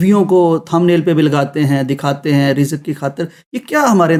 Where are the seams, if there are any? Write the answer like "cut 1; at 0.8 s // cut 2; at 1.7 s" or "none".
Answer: none